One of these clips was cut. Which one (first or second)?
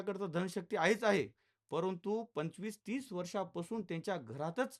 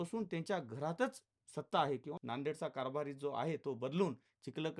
second